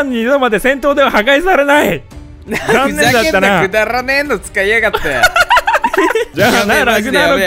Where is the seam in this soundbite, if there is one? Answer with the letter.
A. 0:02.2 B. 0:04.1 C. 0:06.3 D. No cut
C